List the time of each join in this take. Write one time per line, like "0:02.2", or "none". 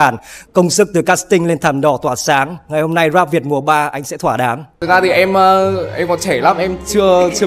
0:04.7